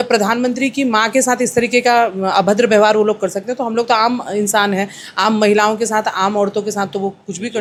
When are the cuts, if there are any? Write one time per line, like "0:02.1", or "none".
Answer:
none